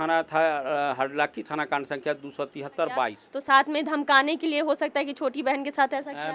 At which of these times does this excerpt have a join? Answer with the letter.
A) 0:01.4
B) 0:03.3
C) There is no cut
B